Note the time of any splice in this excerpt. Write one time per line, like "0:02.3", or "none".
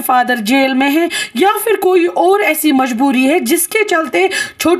none

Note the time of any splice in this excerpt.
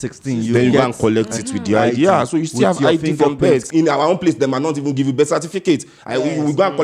0:03.7

